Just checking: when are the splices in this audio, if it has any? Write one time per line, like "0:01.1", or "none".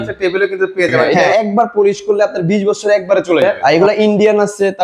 0:01.2
0:03.5